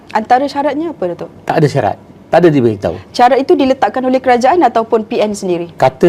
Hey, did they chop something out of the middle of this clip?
no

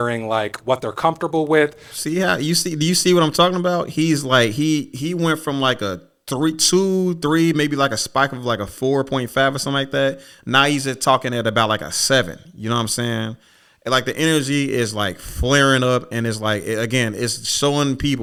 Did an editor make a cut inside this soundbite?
no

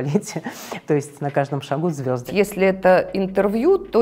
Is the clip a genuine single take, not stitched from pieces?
no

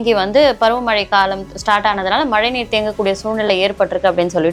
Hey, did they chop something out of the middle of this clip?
no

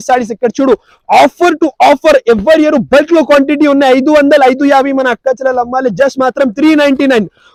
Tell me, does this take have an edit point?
no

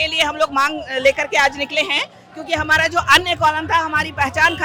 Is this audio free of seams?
yes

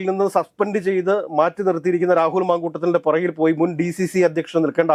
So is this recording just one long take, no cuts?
yes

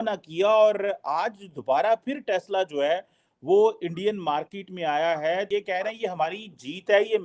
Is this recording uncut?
no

